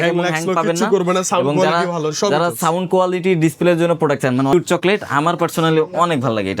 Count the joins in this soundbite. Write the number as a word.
one